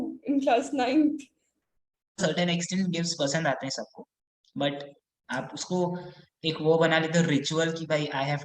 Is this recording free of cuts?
no; 1 cut; at 2.2 s

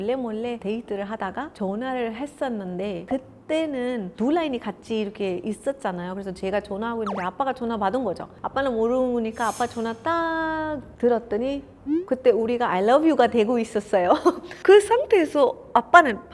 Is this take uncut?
yes; 0 cuts

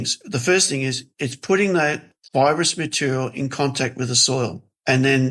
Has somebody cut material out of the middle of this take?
no; 0 cuts

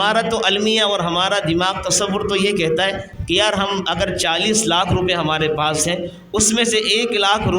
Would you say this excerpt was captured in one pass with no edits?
no; 1 cut; at 3.1 s

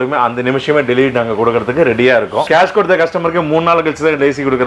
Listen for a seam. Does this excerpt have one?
yes; 1 cut; at 2.5 s

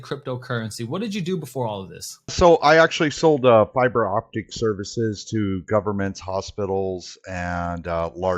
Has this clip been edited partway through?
yes; 1 cut; at 2.3 s

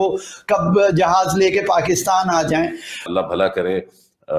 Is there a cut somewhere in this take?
yes; 1 cut; at 3.0 s

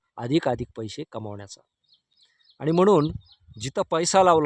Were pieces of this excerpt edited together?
no; 0 cuts

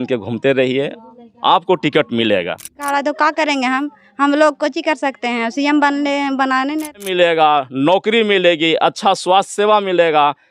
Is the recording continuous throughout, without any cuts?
no; 2 cuts; at 2.8 s, 7.0 s

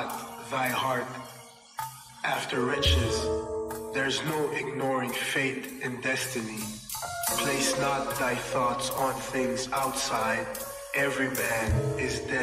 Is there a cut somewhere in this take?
no; 0 cuts

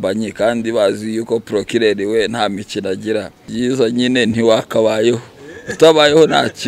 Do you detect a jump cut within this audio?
yes; 1 cut; at 3.5 s

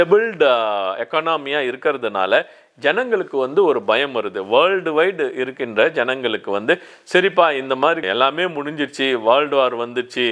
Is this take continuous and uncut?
yes; 0 cuts

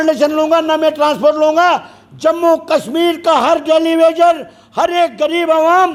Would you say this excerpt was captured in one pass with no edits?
yes; 0 cuts

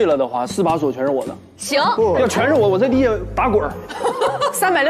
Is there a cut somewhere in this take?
yes; 1 cut; at 2.2 s

